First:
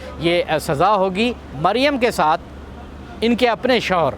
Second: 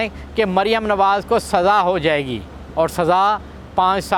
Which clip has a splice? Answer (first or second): first